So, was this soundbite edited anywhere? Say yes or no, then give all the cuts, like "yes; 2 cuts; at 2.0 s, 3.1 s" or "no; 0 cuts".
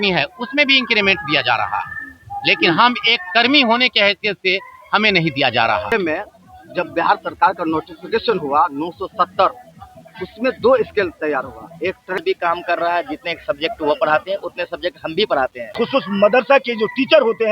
yes; 3 cuts; at 5.9 s, 12.2 s, 15.7 s